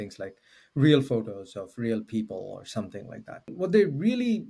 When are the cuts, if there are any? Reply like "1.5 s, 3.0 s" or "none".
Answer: 3.5 s